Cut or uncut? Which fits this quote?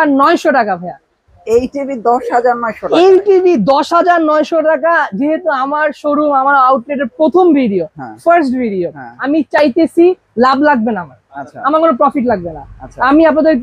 uncut